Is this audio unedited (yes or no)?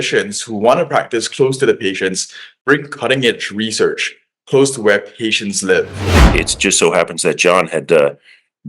no